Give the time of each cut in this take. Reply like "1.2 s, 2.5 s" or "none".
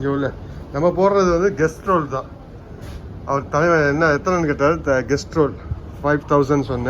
none